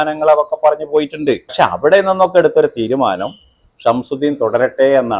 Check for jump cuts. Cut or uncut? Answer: cut